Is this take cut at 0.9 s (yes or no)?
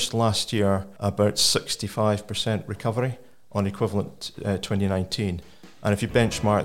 yes